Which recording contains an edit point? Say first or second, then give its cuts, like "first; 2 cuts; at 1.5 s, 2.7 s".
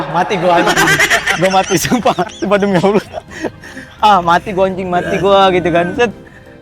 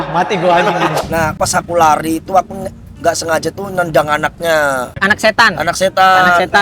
second; 2 cuts; at 1.3 s, 5.0 s